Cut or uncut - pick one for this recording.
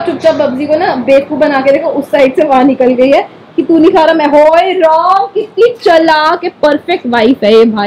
uncut